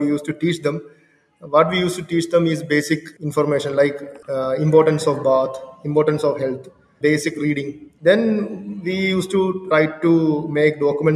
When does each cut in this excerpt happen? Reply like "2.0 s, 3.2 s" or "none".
4.1 s, 6.8 s, 7.8 s, 9.6 s